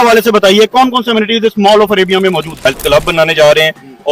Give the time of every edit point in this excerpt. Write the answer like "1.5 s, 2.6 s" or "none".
2.5 s